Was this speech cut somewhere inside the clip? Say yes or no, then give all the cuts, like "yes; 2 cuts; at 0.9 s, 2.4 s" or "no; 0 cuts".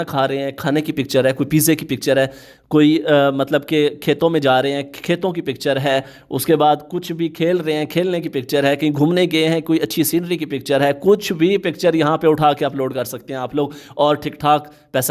no; 0 cuts